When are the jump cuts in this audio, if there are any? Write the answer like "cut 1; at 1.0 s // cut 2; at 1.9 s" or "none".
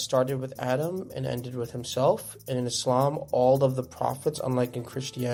none